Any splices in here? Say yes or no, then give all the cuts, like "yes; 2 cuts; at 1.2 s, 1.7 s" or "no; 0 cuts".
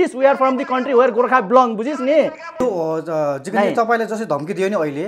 yes; 1 cut; at 2.5 s